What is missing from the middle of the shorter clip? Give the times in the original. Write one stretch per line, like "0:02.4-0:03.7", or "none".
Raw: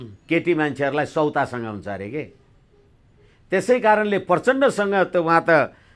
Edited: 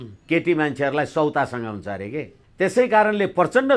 0:02.4-0:03.3